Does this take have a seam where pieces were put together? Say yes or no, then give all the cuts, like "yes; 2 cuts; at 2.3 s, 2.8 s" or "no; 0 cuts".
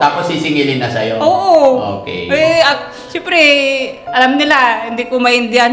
no; 0 cuts